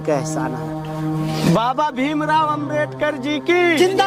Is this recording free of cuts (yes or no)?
yes